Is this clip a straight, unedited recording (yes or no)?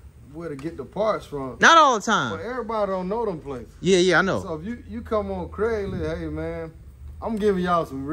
yes